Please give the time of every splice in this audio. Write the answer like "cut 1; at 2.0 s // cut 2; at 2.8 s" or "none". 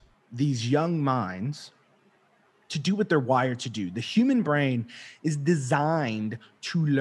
none